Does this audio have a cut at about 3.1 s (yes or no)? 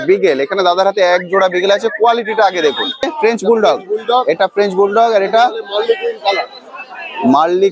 yes